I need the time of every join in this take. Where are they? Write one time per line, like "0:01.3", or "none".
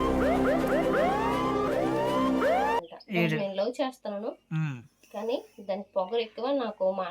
0:02.7